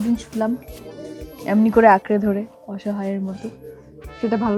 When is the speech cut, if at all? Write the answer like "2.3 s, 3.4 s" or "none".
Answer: none